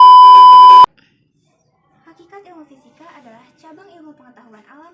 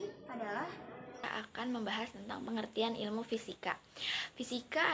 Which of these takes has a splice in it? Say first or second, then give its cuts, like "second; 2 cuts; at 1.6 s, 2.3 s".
second; 1 cut; at 1.2 s